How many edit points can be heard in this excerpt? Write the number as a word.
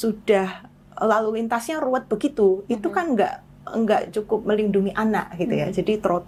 zero